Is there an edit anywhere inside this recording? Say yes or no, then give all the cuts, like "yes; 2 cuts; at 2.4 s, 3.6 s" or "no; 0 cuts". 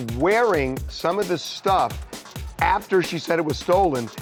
no; 0 cuts